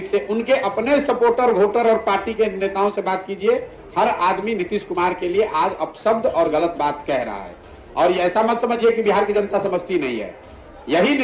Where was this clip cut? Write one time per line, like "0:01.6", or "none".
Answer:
none

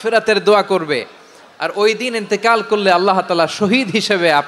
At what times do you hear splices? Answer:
none

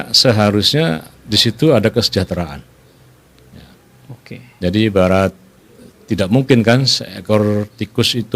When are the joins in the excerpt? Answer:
none

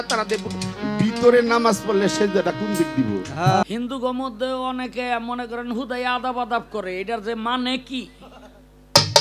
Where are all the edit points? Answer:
0:03.6

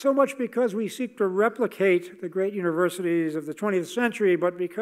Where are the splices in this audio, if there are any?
0:01.2

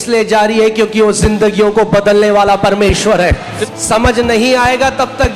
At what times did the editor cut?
0:03.6

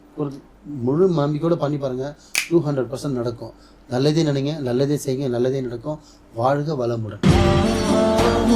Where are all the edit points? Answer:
0:07.2

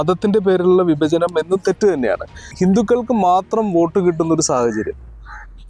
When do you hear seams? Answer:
0:02.5

